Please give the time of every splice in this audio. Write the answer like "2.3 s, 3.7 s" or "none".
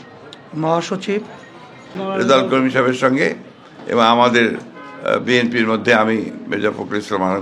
2.0 s